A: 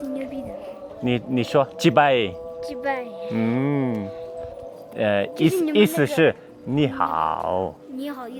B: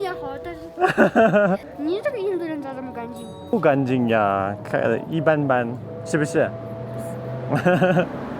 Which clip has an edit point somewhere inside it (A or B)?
B